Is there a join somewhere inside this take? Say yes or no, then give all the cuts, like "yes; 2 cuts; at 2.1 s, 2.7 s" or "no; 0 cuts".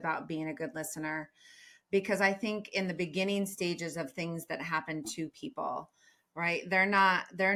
no; 0 cuts